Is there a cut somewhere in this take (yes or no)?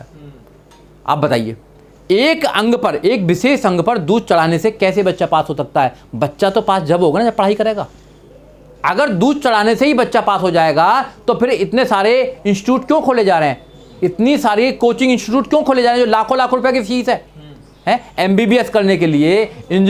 no